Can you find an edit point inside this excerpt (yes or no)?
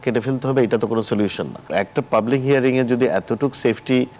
yes